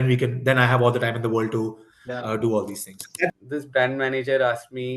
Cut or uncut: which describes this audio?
cut